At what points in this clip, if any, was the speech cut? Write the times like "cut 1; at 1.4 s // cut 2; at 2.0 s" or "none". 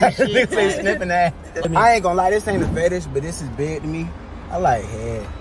cut 1; at 1.7 s